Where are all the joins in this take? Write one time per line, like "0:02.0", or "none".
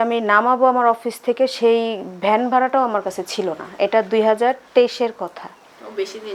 none